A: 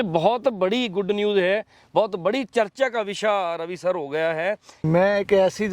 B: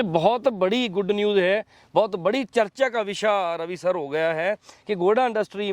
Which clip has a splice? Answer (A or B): A